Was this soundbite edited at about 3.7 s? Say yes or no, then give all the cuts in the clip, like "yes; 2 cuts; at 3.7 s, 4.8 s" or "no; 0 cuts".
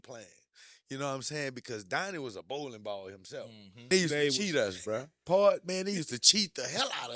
yes; 1 cut; at 3.7 s